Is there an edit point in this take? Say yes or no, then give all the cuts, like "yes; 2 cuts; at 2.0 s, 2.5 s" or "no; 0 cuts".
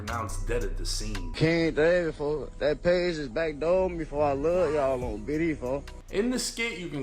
yes; 2 cuts; at 1.3 s, 6.0 s